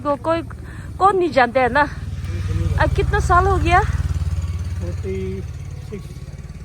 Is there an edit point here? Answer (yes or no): no